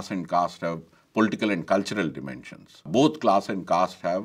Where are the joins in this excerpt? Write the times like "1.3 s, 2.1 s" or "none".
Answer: 2.9 s